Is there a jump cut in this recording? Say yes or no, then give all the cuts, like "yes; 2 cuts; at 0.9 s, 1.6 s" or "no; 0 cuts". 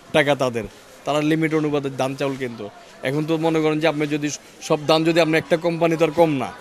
no; 0 cuts